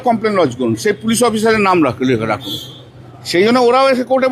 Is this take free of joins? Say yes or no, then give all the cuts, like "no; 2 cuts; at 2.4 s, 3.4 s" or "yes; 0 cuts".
yes; 0 cuts